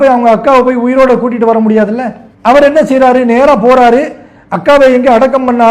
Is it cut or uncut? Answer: uncut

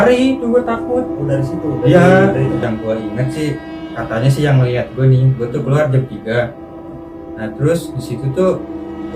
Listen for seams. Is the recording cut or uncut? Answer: cut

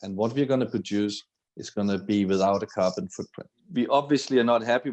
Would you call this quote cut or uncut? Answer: cut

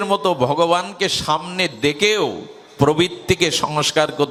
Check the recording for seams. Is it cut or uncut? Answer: uncut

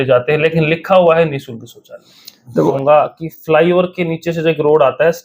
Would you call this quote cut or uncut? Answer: cut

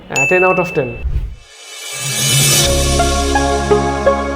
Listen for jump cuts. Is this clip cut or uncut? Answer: cut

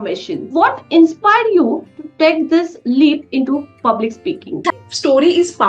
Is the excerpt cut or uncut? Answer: cut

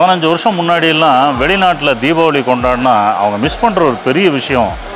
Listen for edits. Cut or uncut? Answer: uncut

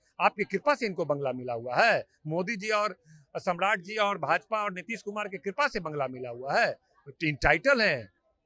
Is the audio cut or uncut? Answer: uncut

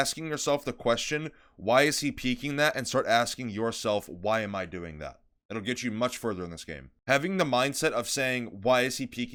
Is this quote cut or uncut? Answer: uncut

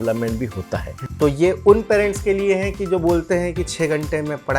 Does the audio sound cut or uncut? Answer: cut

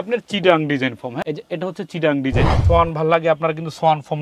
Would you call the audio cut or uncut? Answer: cut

